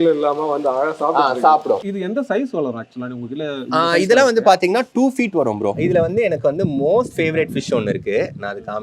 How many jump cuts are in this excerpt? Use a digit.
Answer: 2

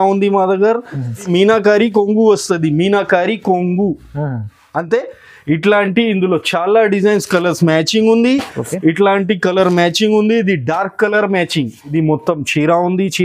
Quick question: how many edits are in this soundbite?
2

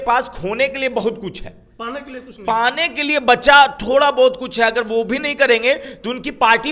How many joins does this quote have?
0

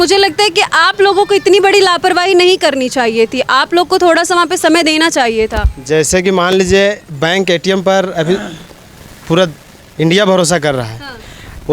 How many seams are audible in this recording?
0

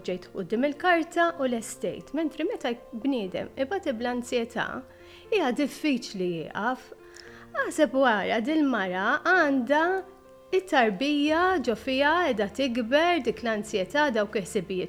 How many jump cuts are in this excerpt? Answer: 0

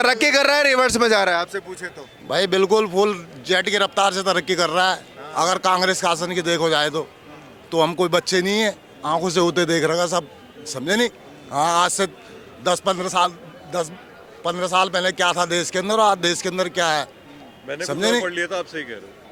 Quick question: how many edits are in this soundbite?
0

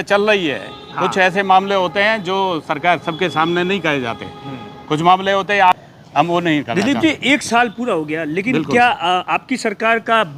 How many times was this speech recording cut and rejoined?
1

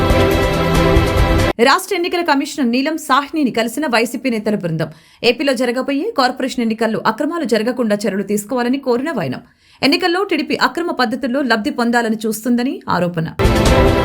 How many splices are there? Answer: 1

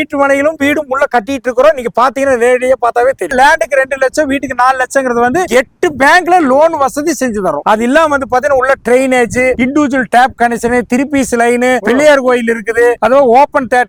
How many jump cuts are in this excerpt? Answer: 0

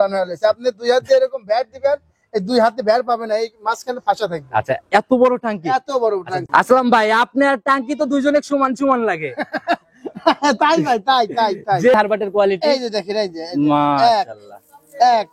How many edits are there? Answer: 2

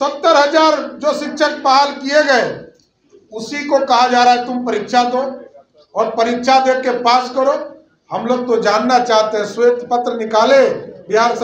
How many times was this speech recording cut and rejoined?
0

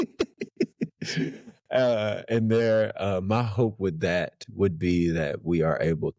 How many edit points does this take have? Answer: 0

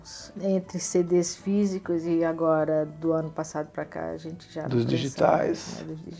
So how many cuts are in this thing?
0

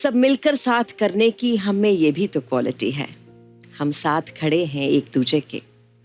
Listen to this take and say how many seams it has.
0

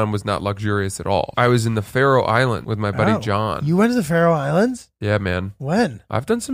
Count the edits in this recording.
2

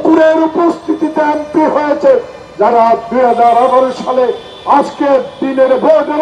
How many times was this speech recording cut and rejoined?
0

